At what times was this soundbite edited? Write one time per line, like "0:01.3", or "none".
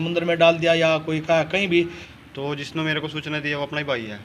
0:02.1